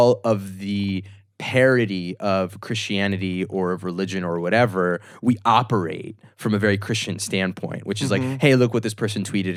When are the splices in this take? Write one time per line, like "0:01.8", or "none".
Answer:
none